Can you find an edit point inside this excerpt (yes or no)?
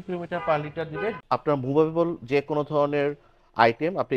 yes